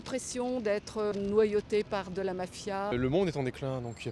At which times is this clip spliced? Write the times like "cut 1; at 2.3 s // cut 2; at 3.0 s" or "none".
cut 1; at 1.1 s // cut 2; at 2.9 s